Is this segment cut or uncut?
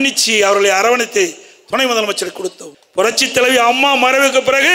cut